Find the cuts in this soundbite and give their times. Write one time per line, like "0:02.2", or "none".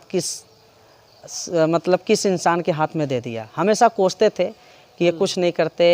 none